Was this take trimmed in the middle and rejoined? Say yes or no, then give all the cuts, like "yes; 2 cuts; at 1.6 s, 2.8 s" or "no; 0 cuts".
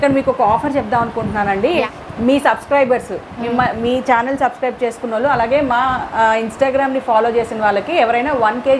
yes; 1 cut; at 1.9 s